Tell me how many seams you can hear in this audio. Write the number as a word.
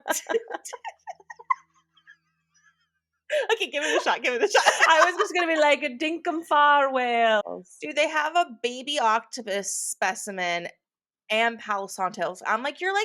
one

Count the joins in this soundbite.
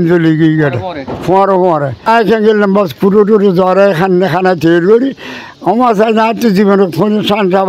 one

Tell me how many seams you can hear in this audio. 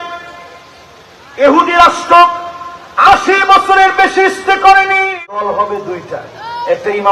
one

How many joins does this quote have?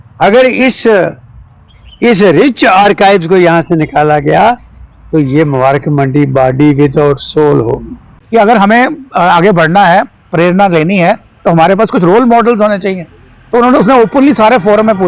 one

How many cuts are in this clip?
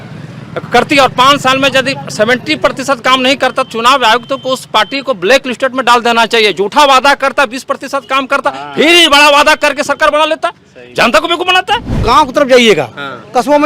one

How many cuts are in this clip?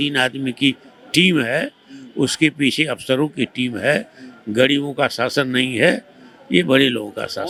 zero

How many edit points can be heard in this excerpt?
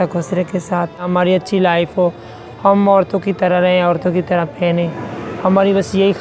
one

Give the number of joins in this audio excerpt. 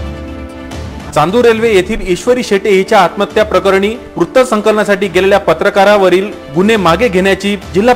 one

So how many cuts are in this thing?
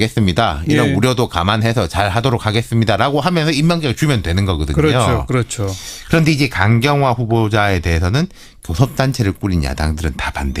one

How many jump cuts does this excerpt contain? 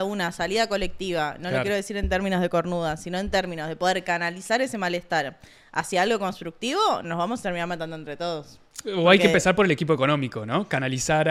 zero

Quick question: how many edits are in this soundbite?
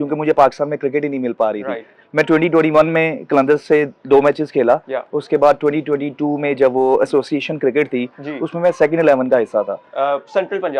zero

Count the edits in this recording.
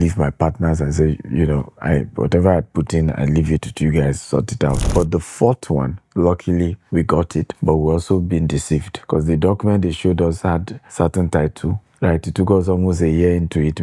five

